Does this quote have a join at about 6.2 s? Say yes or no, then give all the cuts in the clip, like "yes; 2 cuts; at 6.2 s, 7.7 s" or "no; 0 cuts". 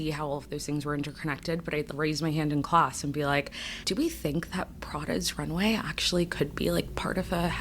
no; 1 cut; at 3.9 s